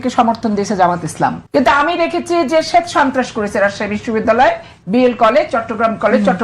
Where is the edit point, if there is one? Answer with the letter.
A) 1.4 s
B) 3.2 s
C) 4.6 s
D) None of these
A